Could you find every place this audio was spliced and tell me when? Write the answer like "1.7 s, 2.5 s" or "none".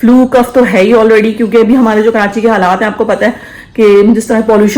none